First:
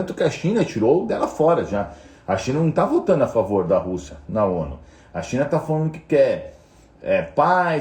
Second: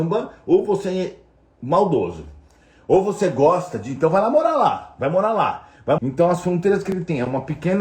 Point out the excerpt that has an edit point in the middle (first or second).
second